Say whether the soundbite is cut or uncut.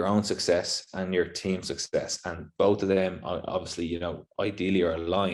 uncut